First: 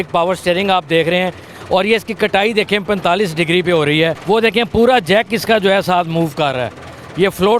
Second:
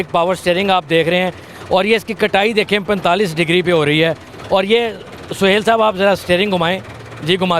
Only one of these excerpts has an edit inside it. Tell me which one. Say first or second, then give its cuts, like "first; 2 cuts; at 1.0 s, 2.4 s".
first; 1 cut; at 4.2 s